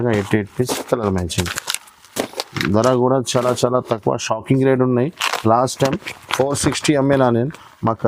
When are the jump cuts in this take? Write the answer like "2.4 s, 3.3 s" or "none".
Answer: none

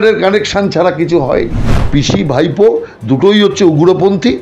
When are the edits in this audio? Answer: 1.9 s

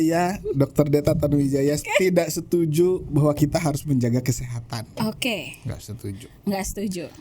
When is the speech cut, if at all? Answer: 1.9 s

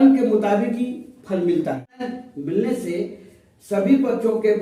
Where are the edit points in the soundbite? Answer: 2.0 s

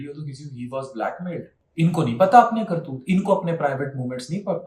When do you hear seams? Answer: 1.6 s

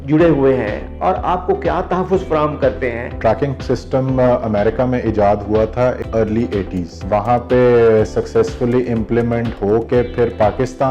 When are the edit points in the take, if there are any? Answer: 3.2 s, 6.0 s, 7.0 s

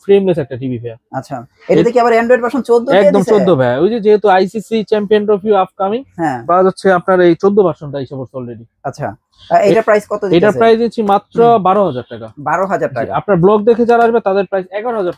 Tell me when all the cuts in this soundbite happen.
none

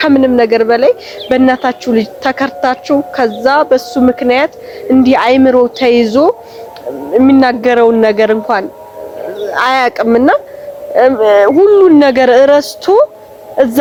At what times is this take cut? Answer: none

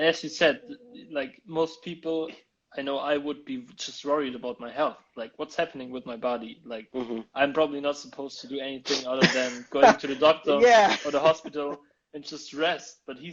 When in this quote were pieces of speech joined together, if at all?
none

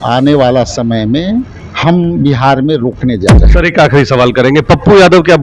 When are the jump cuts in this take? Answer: 1.6 s

